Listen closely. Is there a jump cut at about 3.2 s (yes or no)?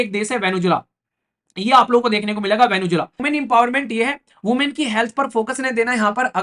yes